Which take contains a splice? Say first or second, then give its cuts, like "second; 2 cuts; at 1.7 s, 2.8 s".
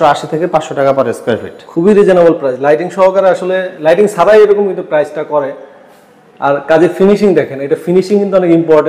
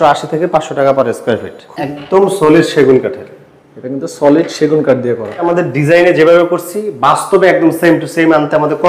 second; 2 cuts; at 1.6 s, 5.5 s